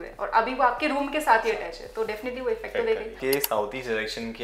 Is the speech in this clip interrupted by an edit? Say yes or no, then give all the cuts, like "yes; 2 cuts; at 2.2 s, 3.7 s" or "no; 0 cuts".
yes; 1 cut; at 3.2 s